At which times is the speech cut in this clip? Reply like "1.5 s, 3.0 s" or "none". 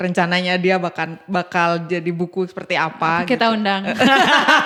none